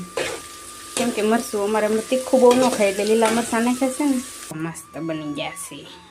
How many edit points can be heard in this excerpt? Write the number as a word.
one